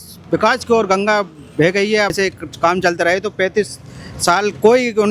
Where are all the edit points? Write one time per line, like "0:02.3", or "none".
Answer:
0:02.1